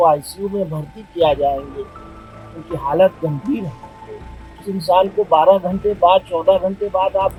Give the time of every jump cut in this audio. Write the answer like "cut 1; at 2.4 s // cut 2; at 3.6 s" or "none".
none